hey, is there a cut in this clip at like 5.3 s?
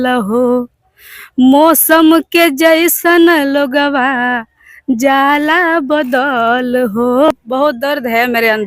no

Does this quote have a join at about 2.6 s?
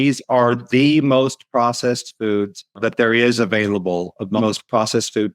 yes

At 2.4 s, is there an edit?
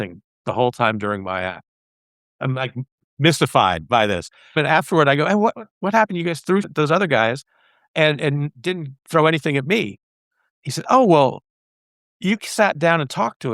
yes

